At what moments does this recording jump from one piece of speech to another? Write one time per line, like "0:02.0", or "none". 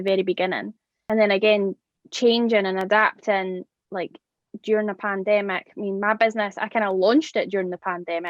0:00.9